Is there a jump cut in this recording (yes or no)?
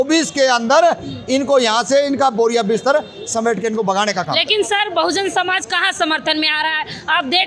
no